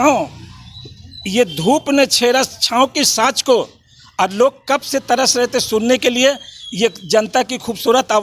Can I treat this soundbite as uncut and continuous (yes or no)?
yes